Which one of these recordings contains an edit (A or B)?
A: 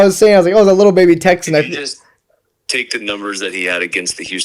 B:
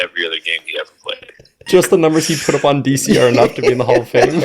B